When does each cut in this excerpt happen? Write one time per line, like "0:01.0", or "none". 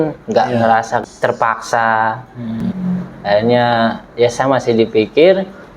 0:01.0
0:02.7